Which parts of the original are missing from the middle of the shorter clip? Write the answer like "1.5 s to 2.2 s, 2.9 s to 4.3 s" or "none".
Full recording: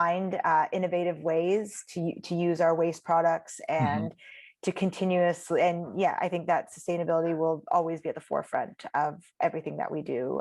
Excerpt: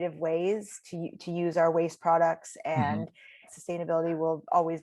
4.5 s to 6.7 s